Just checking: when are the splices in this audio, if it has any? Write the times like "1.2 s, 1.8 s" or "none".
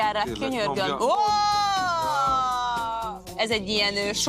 3.3 s